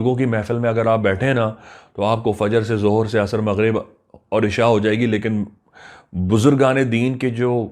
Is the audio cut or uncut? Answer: uncut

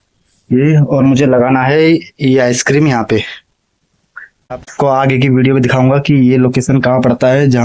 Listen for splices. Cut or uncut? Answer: uncut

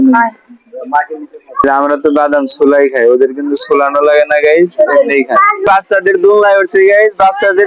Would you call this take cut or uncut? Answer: cut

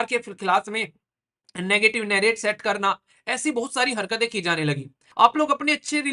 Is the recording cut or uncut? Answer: cut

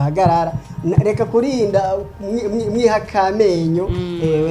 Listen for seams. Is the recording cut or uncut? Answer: uncut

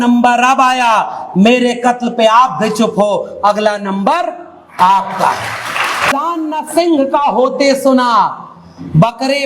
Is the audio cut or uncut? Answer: cut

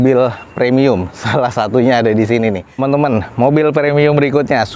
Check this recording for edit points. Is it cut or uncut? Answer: cut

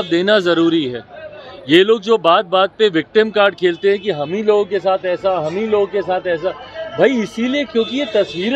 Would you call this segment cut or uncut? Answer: uncut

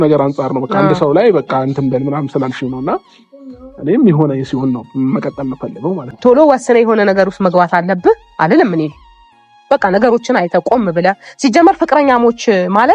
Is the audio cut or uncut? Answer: cut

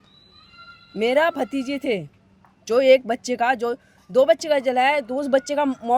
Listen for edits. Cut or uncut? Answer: uncut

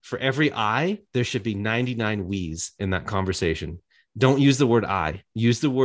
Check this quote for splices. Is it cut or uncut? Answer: uncut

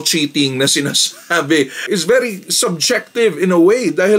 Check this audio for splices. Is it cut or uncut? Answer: cut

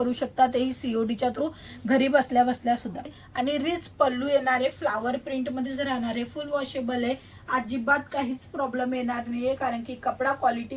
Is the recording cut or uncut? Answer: cut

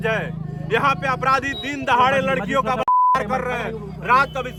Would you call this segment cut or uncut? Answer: uncut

